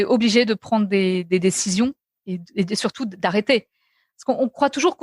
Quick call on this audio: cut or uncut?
uncut